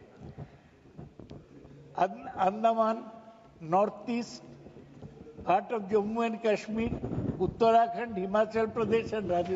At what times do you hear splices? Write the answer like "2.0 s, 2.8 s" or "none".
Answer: none

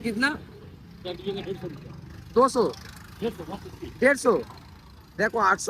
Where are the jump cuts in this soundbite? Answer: none

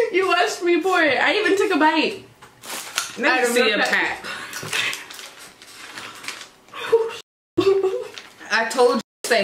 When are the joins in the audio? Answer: none

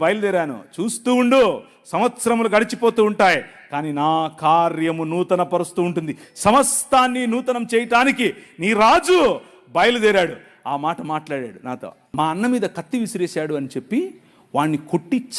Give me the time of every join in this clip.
12.0 s

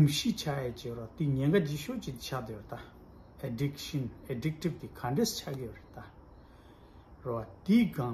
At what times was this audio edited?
none

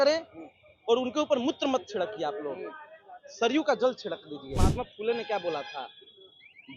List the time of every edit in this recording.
4.6 s

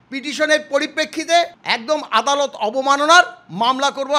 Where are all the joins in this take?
1.7 s

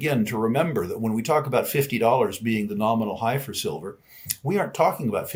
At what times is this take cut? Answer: none

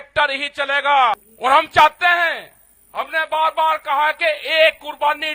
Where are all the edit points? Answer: 1.3 s

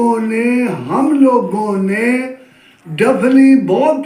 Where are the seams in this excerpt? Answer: none

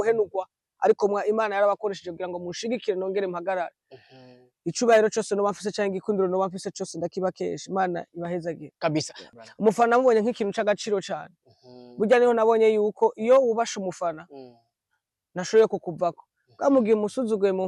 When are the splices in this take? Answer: 9.2 s

